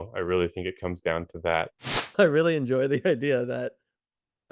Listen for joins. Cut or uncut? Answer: cut